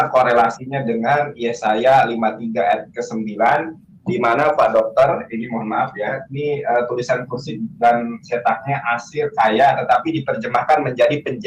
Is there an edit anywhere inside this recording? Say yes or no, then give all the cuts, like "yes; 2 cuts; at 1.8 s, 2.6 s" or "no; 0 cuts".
no; 0 cuts